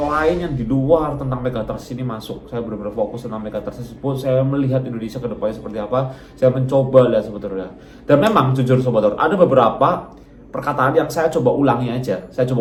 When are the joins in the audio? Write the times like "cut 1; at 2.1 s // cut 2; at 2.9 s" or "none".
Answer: none